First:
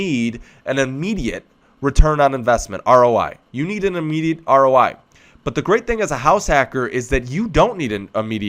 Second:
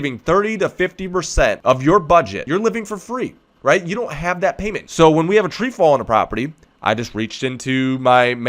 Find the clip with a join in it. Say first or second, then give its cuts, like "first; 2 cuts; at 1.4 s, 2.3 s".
second; 3 cuts; at 1.6 s, 2.4 s, 4.7 s